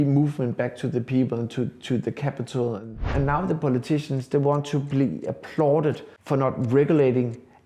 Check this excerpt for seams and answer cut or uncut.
cut